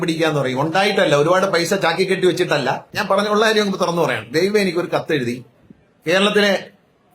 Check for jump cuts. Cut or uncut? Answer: cut